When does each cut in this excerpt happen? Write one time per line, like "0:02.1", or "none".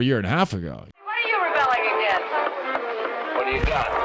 0:01.0

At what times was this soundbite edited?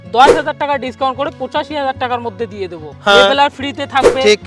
0:02.9

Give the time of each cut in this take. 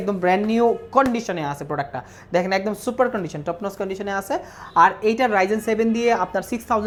none

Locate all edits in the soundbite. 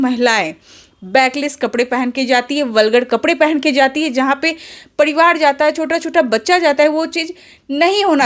none

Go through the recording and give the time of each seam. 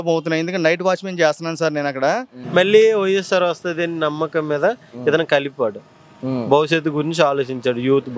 0:02.4

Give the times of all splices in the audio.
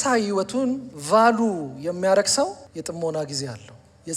0:00.9
0:02.6

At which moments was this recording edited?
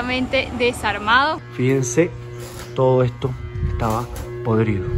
0:01.4

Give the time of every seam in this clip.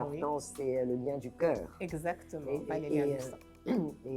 none

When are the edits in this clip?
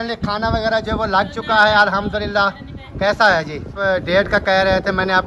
0:03.9

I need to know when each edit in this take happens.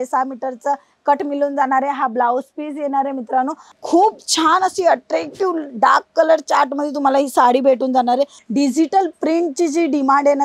0:03.6
0:08.4

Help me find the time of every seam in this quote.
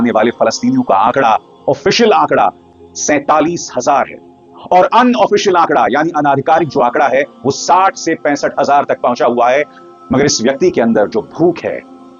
none

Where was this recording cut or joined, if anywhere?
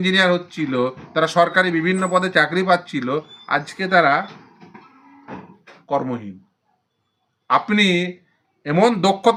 none

